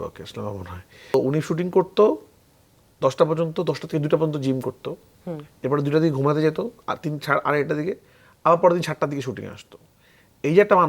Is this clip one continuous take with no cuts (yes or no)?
no